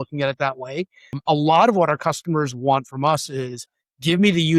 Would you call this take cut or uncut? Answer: cut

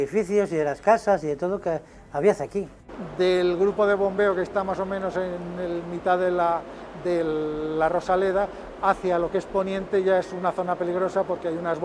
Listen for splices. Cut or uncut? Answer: cut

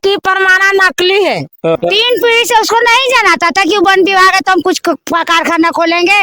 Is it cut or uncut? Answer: cut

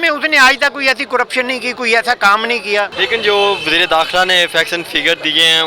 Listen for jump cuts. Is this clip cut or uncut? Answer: cut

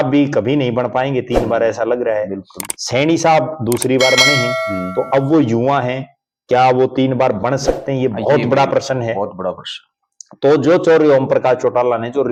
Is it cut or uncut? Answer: uncut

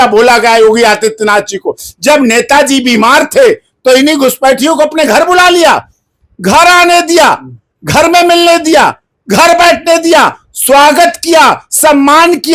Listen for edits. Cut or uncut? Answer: uncut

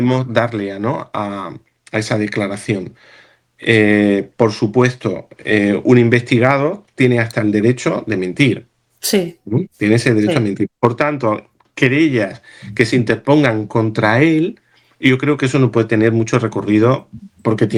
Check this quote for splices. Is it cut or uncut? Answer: uncut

